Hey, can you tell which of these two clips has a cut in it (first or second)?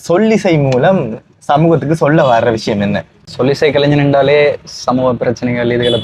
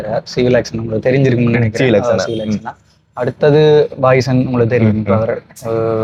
first